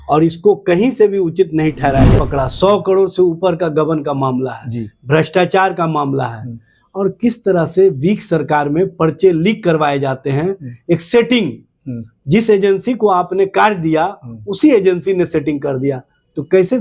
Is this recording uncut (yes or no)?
no